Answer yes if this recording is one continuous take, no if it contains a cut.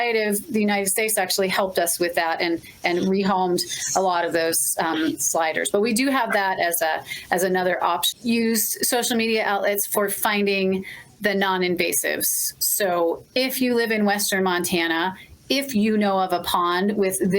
no